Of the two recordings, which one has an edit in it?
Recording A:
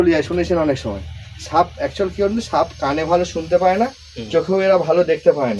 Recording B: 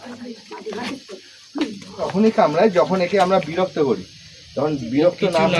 B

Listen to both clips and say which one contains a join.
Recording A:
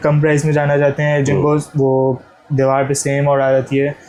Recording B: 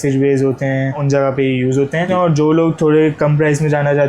B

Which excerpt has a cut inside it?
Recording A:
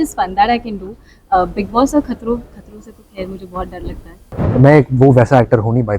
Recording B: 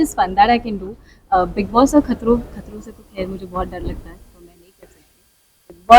A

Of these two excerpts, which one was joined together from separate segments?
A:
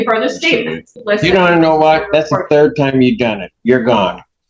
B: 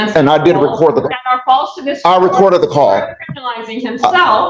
A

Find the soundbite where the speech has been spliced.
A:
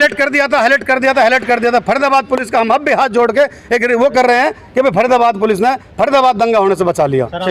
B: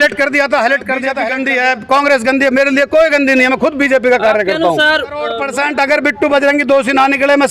B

